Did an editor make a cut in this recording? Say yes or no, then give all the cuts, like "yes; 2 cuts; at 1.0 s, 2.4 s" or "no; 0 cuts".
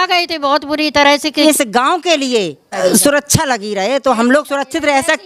yes; 2 cuts; at 1.4 s, 2.7 s